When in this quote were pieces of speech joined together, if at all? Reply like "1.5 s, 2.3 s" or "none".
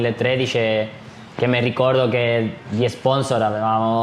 none